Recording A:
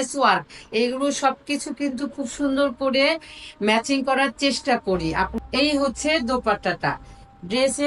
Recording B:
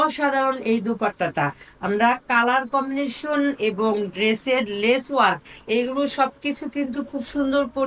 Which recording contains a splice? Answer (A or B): A